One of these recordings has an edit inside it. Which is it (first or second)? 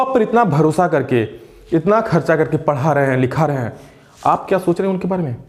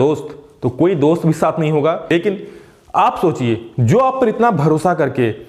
second